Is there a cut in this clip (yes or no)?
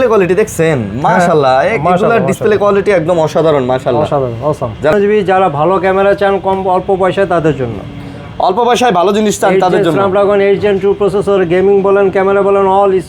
yes